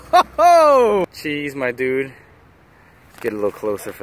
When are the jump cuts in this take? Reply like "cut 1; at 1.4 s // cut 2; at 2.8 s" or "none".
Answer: cut 1; at 1.1 s